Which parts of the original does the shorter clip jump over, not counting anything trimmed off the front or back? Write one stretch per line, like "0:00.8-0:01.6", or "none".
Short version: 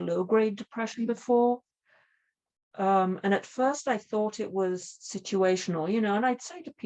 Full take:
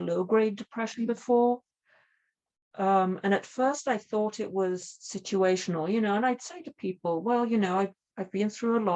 none